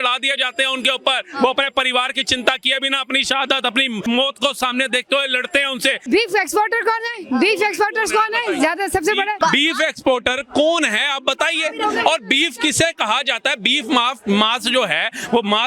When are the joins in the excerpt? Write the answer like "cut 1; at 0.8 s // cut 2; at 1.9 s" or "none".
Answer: cut 1; at 4.0 s // cut 2; at 6.0 s // cut 3; at 9.4 s